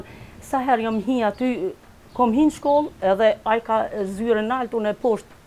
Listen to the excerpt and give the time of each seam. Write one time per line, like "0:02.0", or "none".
none